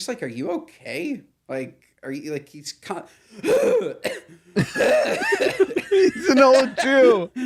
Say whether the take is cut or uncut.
uncut